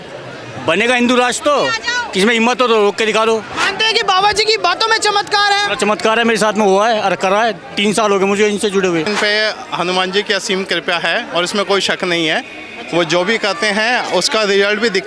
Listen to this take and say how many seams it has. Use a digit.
2